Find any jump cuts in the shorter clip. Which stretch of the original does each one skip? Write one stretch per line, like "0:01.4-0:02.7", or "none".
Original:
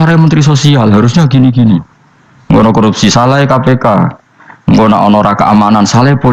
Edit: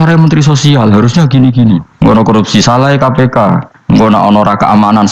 0:01.9-0:02.4
0:04.2-0:04.5